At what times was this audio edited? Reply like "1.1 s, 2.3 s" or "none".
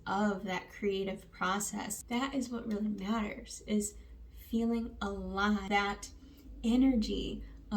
1.9 s, 5.7 s